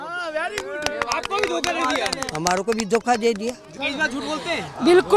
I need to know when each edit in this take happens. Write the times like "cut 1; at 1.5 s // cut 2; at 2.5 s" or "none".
cut 1; at 3.7 s